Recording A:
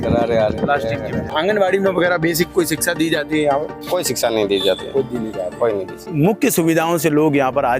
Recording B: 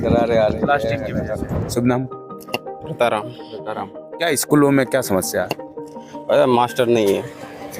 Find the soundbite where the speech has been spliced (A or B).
A